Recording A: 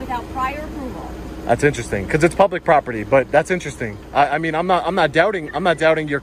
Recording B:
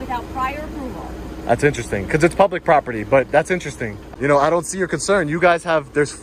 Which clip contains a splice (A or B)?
B